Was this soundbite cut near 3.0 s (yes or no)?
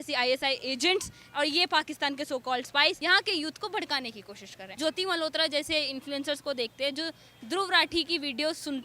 yes